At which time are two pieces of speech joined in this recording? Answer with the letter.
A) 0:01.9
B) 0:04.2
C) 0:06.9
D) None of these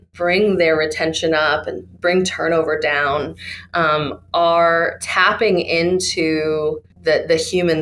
C